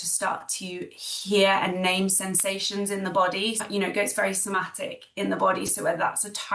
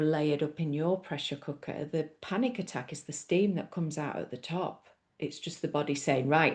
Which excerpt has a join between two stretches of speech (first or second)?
first